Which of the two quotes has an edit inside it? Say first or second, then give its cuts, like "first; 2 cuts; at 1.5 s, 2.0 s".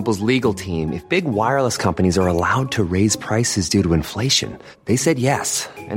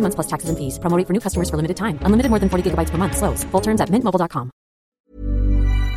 second; 1 cut; at 5.0 s